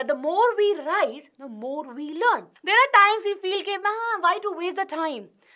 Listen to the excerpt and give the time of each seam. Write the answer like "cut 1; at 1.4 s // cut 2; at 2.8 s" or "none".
cut 1; at 2.5 s